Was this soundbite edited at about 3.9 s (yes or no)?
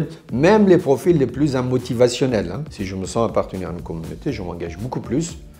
no